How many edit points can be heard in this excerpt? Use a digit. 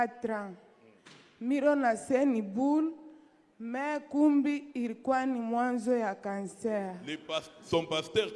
1